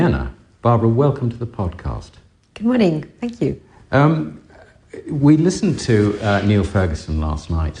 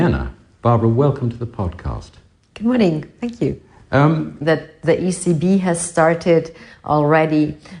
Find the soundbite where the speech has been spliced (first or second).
first